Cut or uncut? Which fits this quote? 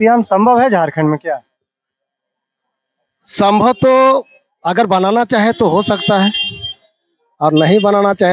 uncut